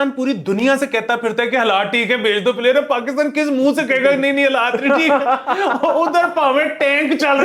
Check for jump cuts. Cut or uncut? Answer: uncut